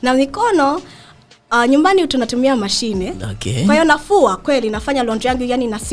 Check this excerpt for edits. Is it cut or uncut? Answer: uncut